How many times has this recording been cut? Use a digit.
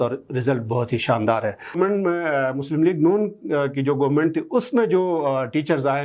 1